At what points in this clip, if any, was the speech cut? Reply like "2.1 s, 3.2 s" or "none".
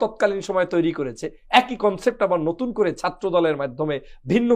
none